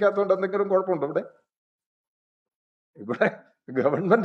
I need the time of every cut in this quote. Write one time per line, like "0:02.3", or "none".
none